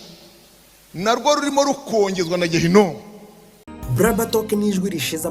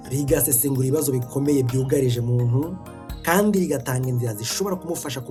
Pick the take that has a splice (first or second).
first